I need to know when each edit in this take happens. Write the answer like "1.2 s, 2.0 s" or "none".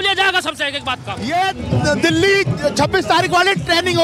1.2 s